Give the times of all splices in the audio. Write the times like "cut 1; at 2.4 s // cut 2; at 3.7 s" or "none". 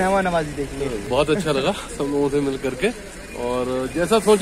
cut 1; at 1.0 s